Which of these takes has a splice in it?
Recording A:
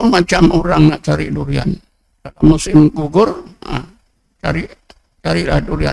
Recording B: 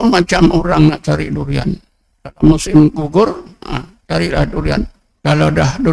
B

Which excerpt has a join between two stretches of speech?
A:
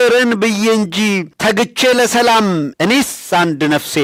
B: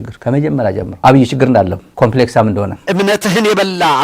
B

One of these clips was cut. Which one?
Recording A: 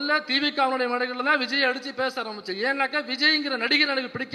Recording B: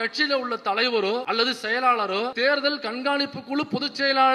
B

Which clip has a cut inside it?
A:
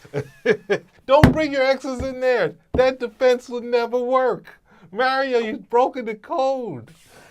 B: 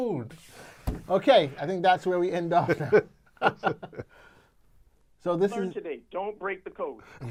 A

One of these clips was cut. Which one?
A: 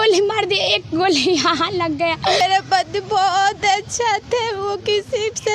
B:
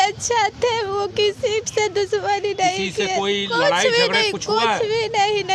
A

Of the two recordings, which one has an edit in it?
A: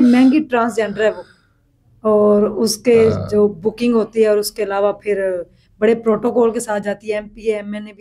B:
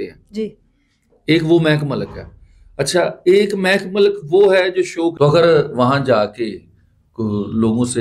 B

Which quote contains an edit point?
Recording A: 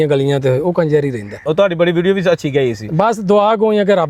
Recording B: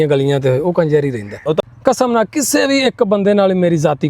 B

